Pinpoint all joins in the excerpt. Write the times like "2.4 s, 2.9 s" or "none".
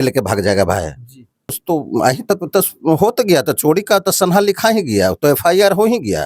1.5 s